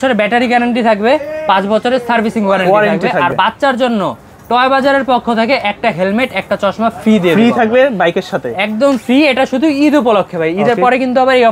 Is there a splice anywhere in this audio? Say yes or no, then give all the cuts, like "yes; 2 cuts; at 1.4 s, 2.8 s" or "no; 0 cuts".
no; 0 cuts